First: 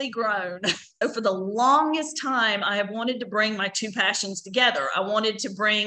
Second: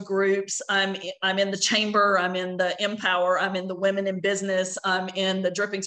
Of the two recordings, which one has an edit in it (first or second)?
first